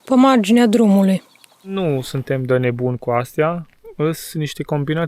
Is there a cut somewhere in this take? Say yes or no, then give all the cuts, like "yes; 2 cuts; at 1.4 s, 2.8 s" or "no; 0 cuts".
yes; 1 cut; at 1.7 s